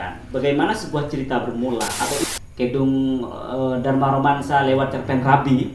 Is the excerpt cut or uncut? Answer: cut